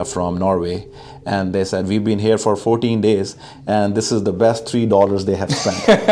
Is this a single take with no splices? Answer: yes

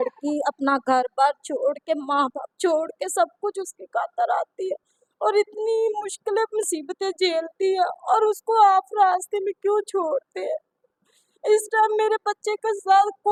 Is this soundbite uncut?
yes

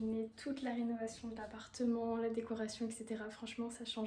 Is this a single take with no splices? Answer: yes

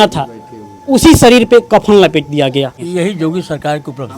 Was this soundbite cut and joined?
yes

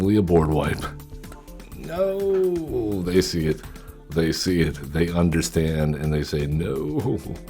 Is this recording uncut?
yes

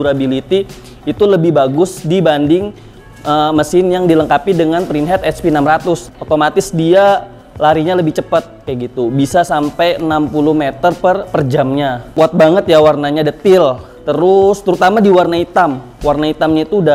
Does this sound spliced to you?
yes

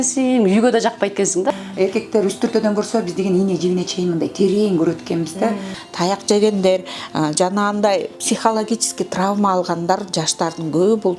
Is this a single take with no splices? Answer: no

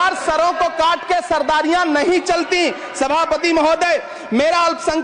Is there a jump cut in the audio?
no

